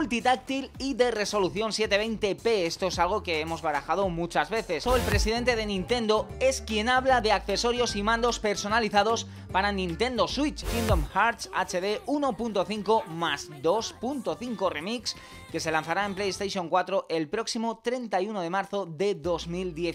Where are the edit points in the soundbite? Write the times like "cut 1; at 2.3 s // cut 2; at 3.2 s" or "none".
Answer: cut 1; at 4.8 s // cut 2; at 10.7 s